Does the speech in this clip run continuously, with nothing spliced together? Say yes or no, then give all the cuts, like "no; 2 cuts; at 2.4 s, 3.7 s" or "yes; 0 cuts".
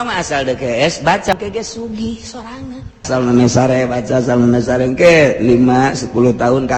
no; 2 cuts; at 1.3 s, 3.1 s